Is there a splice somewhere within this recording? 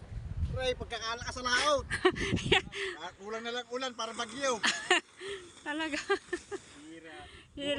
no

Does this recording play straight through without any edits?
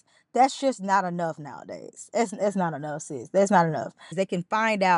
no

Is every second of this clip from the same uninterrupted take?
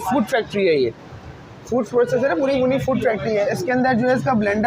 yes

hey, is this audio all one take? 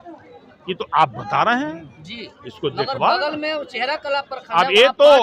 yes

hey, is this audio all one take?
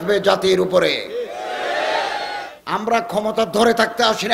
no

